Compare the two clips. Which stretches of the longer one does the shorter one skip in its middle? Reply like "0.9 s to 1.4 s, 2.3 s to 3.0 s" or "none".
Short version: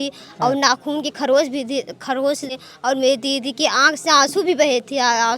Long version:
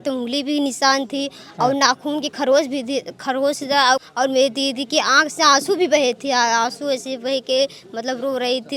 3.8 s to 3.9 s